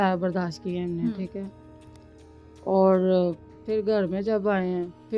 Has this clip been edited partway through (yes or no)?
no